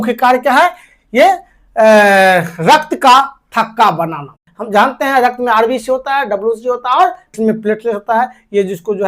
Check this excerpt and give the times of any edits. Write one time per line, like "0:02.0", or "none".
0:04.5
0:07.3